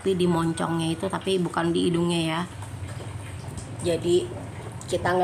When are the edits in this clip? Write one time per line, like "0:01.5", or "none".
0:02.6